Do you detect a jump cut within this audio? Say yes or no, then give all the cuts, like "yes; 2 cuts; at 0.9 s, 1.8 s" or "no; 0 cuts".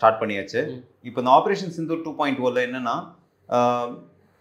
no; 0 cuts